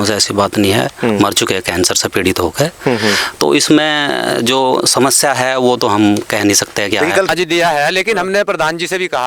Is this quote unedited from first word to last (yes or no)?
no